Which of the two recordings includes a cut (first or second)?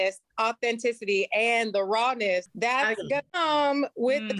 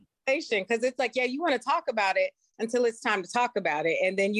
first